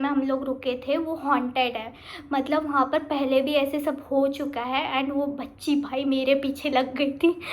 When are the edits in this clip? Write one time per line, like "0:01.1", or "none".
none